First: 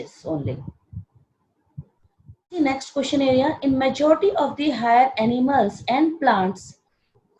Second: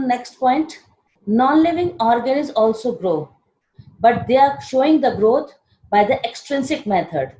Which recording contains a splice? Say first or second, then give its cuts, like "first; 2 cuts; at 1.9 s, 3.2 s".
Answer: first; 1 cut; at 2.6 s